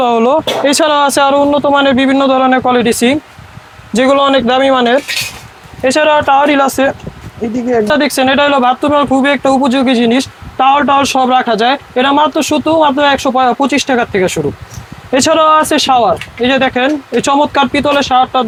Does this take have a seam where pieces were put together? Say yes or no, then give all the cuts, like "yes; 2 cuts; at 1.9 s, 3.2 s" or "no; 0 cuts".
no; 0 cuts